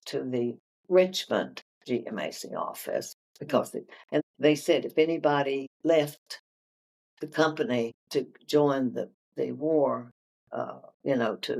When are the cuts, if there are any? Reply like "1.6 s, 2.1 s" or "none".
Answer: 4.2 s, 5.7 s, 8.0 s